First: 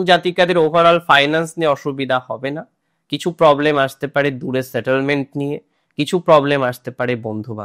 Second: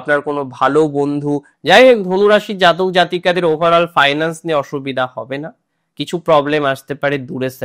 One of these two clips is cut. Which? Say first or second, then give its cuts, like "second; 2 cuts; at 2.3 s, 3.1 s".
second; 1 cut; at 1.5 s